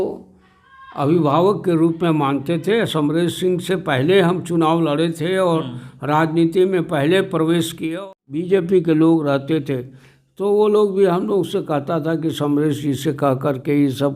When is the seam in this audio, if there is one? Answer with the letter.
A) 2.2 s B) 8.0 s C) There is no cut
B